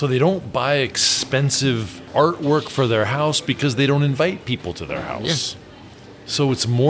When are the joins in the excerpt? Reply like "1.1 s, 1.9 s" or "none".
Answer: 2.1 s

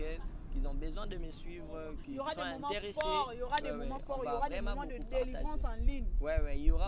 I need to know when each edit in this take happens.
none

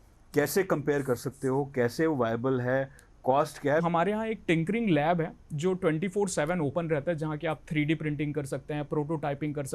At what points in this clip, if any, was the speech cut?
3.8 s

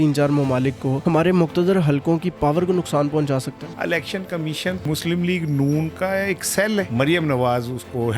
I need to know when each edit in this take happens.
0.9 s, 3.6 s, 4.8 s, 6.9 s

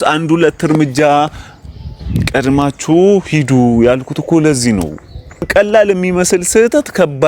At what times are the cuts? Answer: 5.5 s

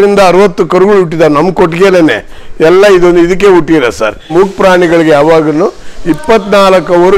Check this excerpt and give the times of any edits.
4.3 s

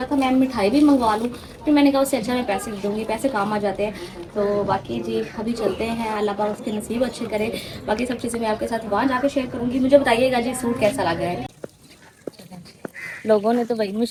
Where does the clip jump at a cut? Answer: none

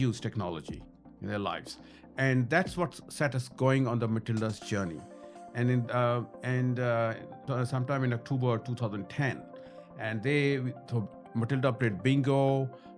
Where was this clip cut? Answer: 7.4 s

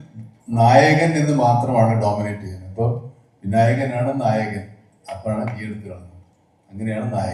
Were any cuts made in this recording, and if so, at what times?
none

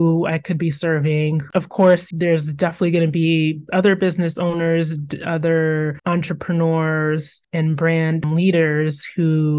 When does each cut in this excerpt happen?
1.4 s, 8.2 s

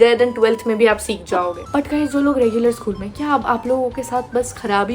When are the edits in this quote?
1.6 s

